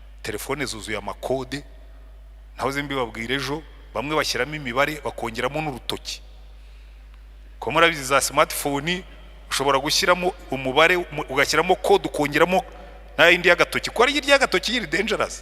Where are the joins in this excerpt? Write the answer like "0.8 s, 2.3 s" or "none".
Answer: none